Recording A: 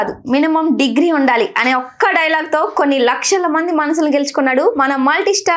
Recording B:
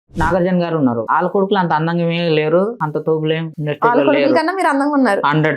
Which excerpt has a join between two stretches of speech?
B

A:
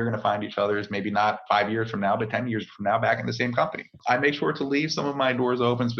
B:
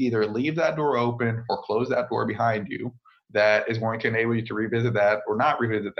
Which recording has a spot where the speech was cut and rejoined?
A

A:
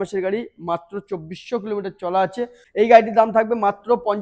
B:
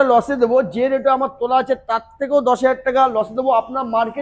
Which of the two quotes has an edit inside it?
A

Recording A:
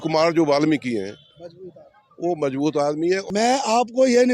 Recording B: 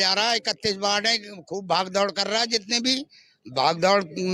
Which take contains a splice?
A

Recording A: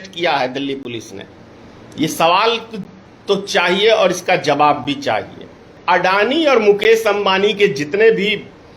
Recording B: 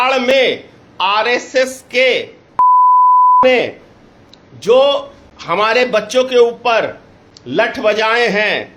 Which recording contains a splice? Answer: A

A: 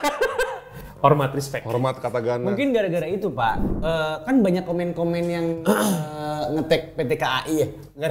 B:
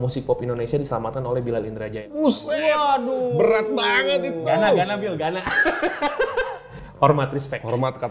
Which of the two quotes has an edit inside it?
A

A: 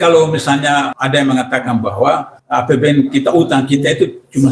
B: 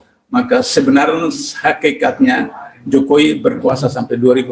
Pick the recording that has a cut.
A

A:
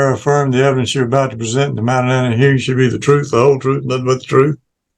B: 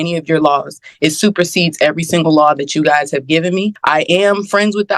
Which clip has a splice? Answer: B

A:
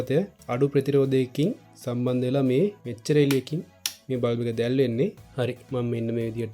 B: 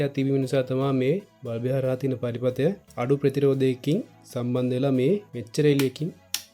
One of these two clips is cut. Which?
A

